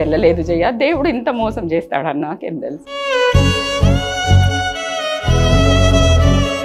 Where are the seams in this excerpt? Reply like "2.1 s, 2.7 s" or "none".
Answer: none